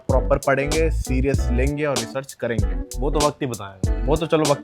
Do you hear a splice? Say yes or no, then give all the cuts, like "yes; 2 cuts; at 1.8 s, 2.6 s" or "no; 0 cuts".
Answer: no; 0 cuts